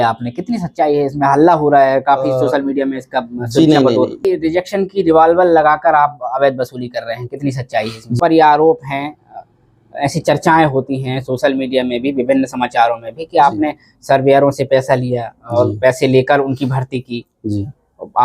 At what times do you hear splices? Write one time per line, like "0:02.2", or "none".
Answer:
0:04.2
0:08.2